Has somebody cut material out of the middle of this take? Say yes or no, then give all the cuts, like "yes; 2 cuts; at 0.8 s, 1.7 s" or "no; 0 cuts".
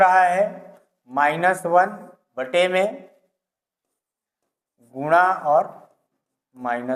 no; 0 cuts